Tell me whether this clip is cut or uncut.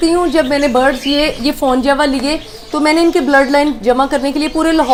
uncut